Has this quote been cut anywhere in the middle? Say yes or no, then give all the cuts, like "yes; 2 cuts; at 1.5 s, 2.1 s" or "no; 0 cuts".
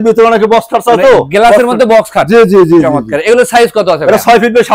no; 0 cuts